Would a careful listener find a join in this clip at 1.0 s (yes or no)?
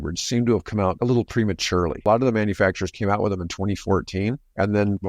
yes